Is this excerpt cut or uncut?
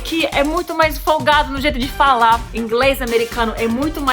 cut